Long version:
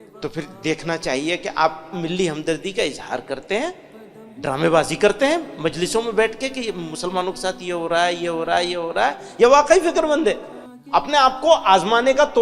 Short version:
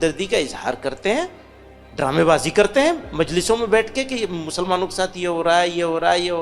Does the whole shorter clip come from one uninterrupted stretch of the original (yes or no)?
yes